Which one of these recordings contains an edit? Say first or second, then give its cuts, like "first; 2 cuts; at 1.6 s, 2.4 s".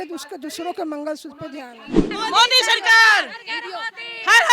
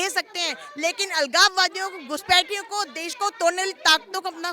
first; 1 cut; at 2.0 s